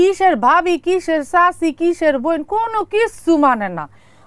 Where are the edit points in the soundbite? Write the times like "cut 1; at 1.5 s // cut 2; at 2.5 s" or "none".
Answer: none